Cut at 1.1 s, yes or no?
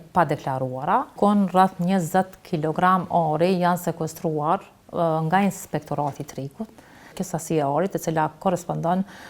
yes